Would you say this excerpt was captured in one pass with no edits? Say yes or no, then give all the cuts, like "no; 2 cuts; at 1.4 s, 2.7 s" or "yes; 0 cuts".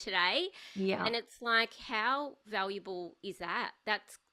yes; 0 cuts